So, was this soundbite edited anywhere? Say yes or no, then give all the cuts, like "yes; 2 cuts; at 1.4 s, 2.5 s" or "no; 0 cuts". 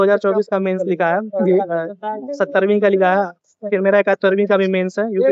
no; 0 cuts